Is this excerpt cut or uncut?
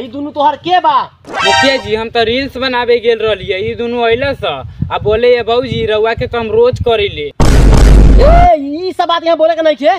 uncut